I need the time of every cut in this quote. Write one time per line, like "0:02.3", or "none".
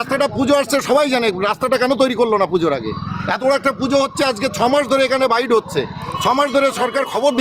none